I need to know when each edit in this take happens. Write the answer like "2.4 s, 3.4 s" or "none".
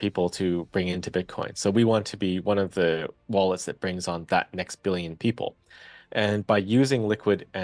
none